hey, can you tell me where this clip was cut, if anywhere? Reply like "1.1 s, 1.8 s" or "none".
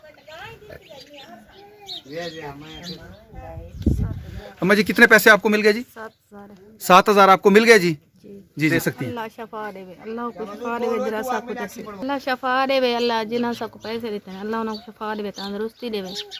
8.9 s